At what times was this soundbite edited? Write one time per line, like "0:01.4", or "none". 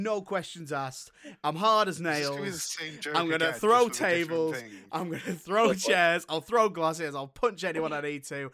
none